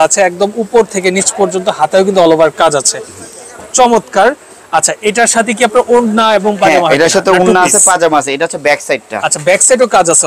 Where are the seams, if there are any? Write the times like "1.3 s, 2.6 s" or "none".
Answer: none